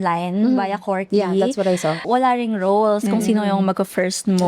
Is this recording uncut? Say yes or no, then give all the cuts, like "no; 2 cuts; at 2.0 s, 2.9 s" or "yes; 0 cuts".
no; 1 cut; at 2.0 s